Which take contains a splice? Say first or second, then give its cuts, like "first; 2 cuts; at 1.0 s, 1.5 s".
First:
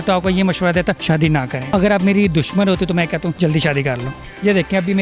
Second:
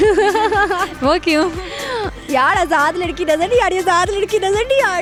first; 2 cuts; at 1.1 s, 3.4 s